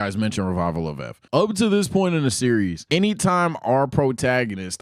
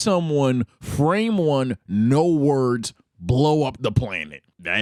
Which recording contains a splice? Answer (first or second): first